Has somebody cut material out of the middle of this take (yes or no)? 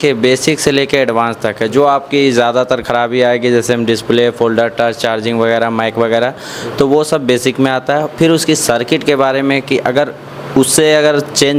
no